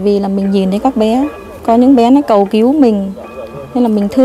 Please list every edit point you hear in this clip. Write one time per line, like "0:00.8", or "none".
0:01.5